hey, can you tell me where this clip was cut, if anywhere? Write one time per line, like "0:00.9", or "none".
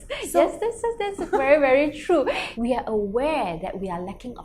0:02.4